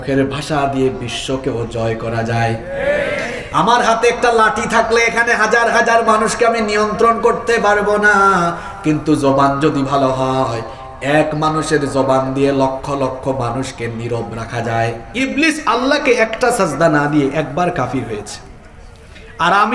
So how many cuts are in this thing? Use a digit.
1